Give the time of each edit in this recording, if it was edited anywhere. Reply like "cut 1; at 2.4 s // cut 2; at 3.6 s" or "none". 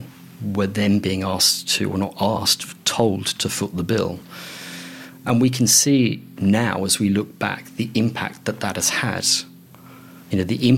none